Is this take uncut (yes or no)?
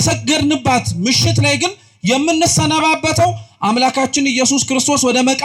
yes